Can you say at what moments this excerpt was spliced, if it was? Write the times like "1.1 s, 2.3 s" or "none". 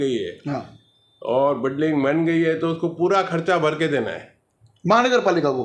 none